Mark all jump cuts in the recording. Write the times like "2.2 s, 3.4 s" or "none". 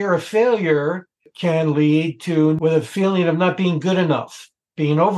1.3 s, 2.6 s